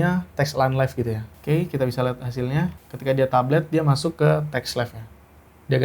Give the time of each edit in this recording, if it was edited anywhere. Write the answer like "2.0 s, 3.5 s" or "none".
1.3 s, 2.9 s